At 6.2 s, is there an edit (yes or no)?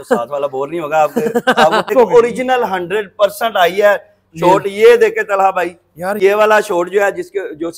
yes